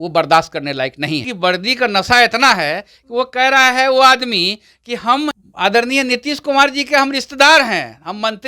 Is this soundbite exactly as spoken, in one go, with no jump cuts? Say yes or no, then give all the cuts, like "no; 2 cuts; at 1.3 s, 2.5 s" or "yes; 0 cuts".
no; 2 cuts; at 1.3 s, 5.5 s